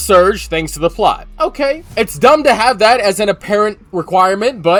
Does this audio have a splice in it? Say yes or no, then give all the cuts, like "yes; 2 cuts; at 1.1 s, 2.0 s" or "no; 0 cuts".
no; 0 cuts